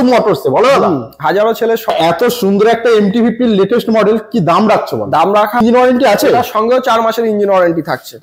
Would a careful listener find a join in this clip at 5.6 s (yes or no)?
yes